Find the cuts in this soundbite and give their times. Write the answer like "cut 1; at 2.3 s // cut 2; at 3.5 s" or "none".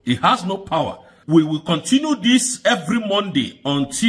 cut 1; at 1.1 s